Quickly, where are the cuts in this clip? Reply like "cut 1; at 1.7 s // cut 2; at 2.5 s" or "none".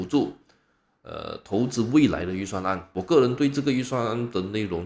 cut 1; at 2.9 s